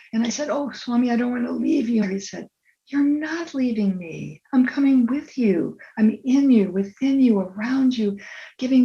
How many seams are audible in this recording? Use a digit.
1